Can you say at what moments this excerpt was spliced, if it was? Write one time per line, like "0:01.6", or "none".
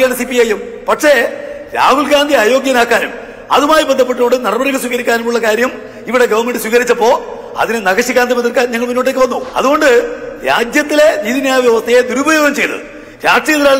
0:09.4